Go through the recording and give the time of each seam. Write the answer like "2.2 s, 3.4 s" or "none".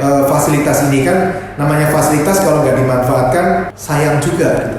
3.8 s